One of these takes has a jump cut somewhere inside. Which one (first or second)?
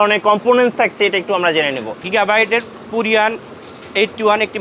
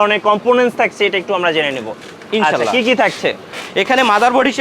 first